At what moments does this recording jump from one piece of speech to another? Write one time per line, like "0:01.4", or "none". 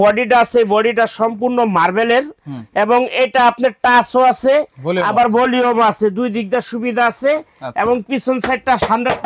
none